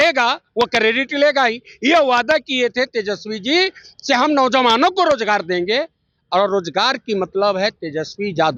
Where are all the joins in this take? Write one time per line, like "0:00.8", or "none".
none